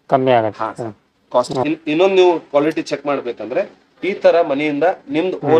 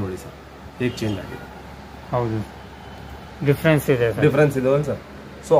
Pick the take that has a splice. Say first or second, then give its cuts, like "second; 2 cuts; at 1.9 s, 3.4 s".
first; 1 cut; at 1.5 s